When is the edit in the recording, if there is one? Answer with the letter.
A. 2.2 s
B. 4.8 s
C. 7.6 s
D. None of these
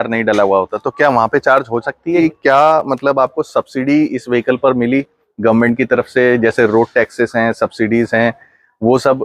A